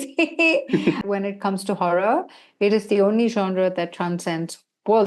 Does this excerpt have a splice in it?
yes; 1 cut; at 1.0 s

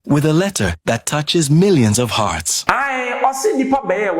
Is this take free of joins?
no; 1 cut; at 2.6 s

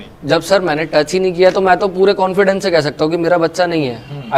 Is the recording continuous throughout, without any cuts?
yes; 0 cuts

